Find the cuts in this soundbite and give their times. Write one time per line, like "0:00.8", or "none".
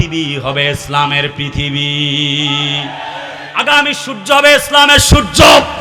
none